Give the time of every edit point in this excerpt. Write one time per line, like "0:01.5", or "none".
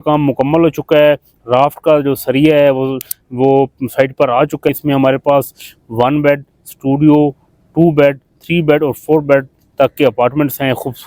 0:04.7

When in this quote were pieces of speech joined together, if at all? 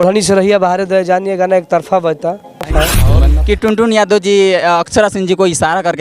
0:03.0

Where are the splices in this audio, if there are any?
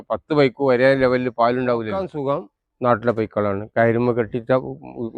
0:02.2

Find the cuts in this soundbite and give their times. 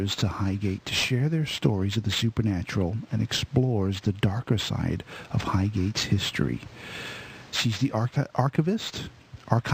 0:04.8

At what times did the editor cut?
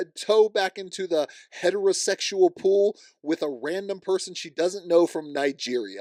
none

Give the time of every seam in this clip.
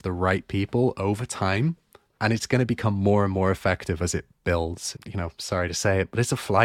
0:04.9

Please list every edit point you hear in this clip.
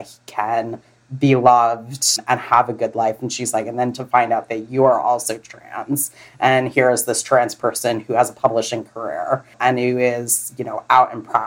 0:02.2
0:09.6

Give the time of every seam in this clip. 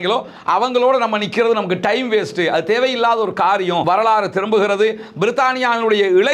0:03.8

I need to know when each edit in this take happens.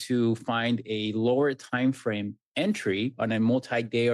0:02.4
0:03.2

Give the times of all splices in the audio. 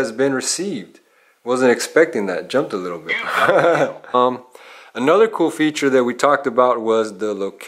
0:04.1

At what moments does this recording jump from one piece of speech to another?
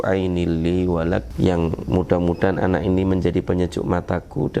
0:01.3

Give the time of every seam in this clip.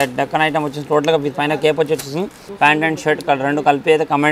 0:02.4

